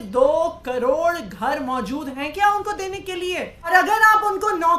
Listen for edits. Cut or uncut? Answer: cut